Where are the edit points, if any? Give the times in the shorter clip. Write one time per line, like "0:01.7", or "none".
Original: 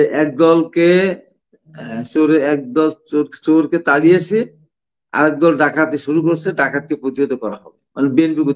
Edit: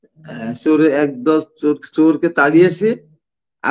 none